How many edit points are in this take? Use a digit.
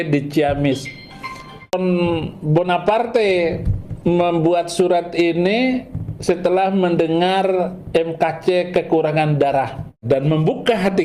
2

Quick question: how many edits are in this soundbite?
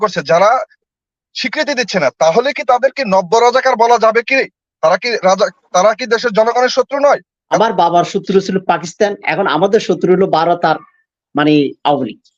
1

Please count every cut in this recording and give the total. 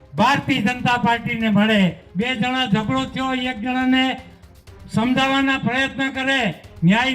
1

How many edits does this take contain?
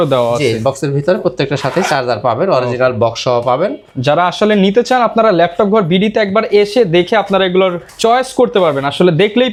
0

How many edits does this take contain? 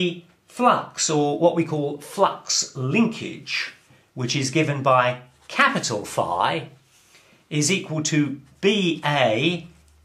1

